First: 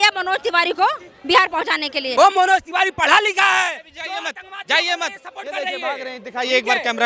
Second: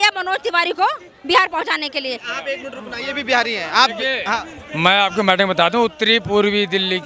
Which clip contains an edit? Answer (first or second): first